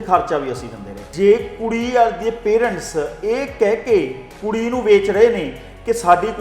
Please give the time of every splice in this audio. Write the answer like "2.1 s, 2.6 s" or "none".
1.1 s